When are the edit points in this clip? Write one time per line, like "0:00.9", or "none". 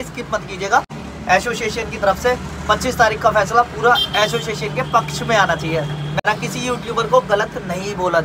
0:01.1
0:06.2